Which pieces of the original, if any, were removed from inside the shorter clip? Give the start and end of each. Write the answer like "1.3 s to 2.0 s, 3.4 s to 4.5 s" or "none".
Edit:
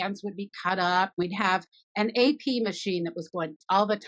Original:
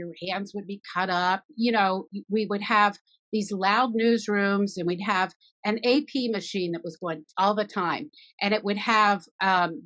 1.4 s to 4.8 s

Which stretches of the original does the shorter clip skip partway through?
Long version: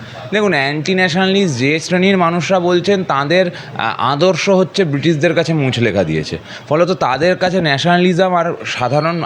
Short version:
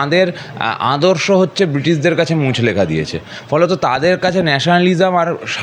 none

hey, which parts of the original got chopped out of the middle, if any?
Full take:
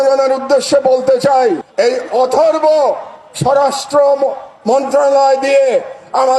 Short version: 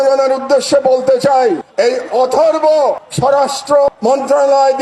3.1 s to 3.3 s, 4.1 s to 4.5 s

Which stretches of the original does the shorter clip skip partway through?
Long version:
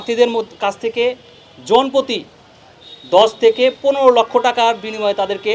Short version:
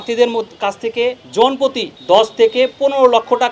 1.2 s to 1.6 s, 2.2 s to 2.9 s

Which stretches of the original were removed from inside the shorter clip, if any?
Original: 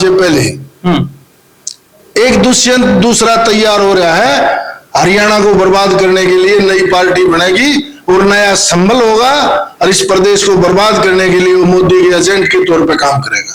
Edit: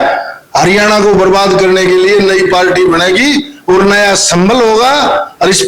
none

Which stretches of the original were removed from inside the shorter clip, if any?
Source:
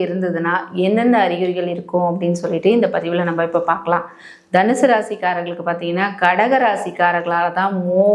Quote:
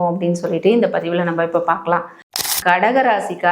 4.5 s to 6.0 s

